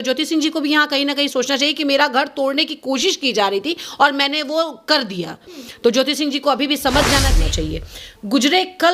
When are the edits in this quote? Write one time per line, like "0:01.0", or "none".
0:07.4